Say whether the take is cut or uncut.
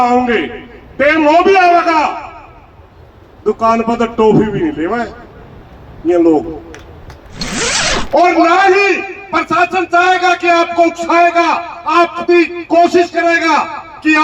cut